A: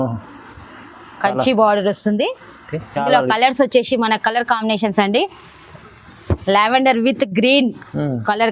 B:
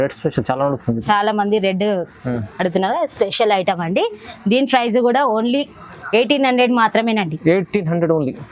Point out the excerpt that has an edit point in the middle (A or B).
A